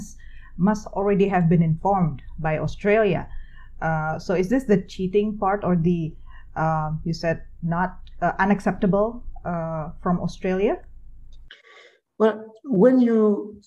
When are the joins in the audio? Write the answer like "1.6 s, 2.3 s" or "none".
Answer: none

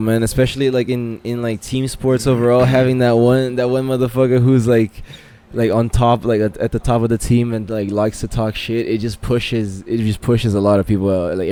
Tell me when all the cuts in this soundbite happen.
none

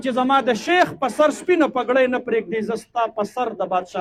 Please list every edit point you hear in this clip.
none

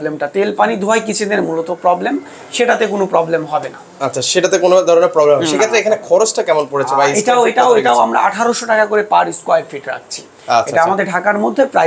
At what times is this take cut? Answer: none

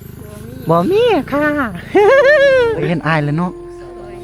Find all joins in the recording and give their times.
2.8 s

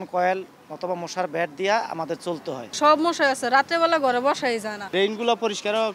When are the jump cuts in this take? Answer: 2.7 s, 4.9 s

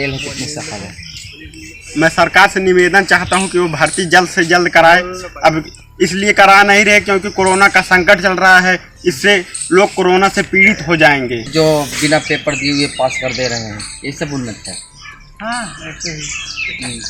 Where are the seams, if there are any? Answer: 11.4 s

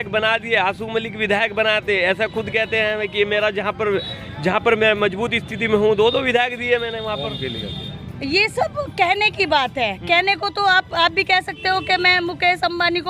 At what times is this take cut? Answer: none

